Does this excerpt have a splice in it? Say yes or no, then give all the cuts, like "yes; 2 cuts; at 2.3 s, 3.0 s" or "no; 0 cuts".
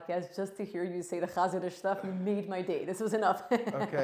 no; 0 cuts